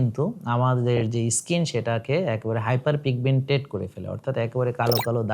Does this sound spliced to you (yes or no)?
no